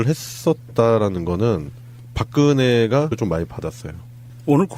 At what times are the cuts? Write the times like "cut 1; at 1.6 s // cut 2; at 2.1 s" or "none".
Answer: none

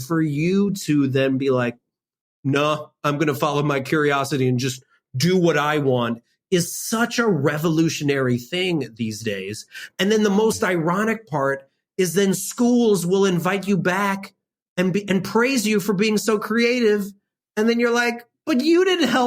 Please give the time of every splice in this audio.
cut 1; at 1.8 s

